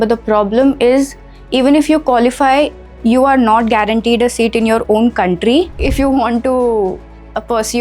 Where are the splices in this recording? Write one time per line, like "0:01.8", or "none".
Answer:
0:05.7